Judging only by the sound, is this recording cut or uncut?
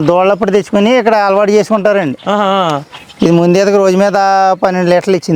uncut